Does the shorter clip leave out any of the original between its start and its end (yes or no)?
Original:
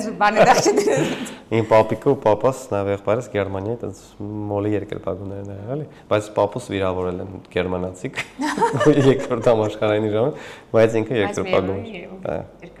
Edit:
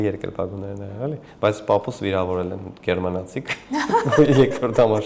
no